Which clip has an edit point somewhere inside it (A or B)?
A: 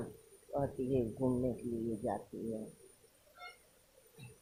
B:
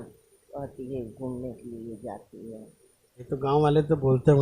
B